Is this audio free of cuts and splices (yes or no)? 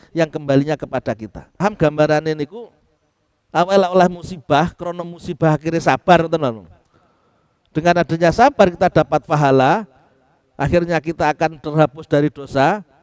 no